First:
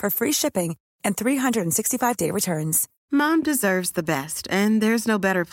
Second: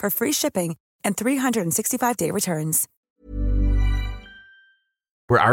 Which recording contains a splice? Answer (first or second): first